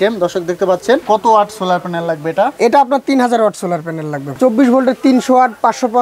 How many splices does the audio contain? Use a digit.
2